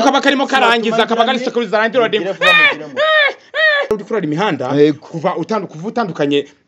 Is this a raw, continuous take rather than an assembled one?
no; 1 cut; at 3.9 s

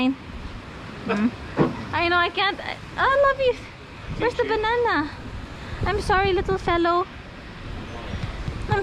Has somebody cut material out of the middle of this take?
no; 0 cuts

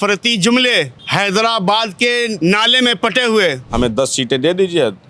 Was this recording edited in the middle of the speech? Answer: yes; 3 cuts; at 1.0 s, 2.3 s, 3.6 s

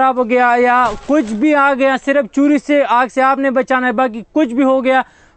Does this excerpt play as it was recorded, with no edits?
yes; 0 cuts

